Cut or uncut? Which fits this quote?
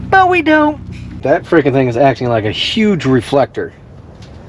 cut